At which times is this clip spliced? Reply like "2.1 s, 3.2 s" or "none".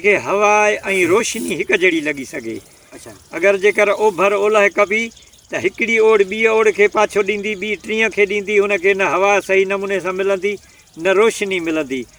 none